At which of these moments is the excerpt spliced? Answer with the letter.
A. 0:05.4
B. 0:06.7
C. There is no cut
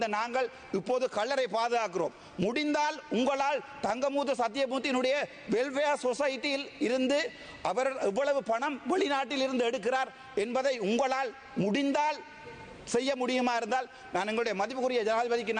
C